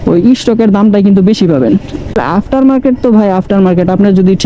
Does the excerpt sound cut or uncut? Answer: cut